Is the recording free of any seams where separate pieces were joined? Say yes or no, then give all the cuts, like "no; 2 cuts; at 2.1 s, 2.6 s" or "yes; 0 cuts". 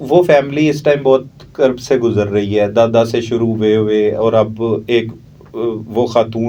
yes; 0 cuts